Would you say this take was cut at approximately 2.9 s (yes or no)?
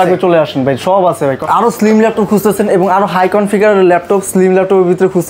no